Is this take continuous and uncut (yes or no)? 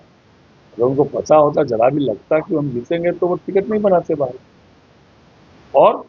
yes